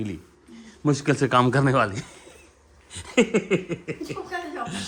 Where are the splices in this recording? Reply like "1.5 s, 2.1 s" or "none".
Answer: none